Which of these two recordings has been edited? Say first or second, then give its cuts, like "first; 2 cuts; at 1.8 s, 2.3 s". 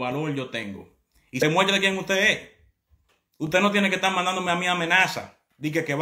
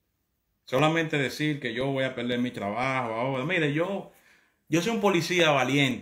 first; 1 cut; at 1.4 s